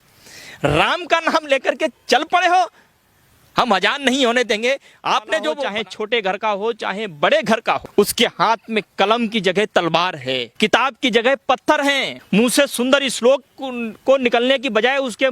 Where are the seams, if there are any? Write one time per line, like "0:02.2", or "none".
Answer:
0:05.6
0:07.9
0:10.5
0:12.1